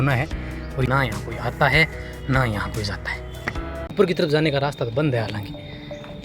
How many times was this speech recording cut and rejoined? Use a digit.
2